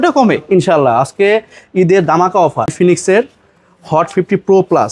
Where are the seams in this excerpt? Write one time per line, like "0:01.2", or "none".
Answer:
0:02.7